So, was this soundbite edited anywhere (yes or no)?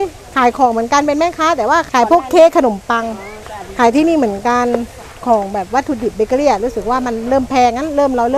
yes